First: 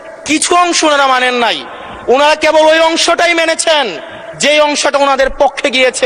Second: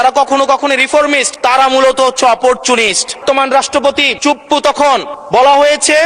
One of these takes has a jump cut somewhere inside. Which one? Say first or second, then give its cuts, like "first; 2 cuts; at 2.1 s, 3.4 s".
second; 4 cuts; at 1.3 s, 3.2 s, 4.1 s, 5.1 s